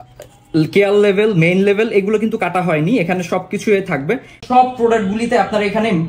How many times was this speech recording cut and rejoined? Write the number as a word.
one